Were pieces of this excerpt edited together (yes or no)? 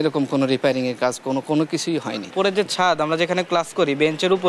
yes